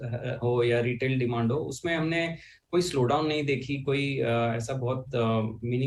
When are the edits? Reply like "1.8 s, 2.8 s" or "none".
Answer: none